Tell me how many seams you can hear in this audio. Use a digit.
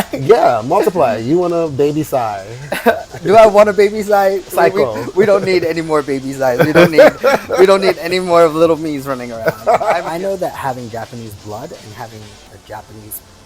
1